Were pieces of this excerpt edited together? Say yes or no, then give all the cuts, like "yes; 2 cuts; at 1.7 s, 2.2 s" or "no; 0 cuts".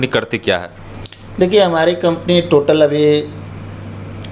no; 0 cuts